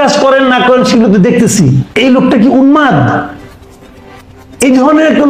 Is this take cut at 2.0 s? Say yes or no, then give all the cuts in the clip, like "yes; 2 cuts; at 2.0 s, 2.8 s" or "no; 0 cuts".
yes; 1 cut; at 2.0 s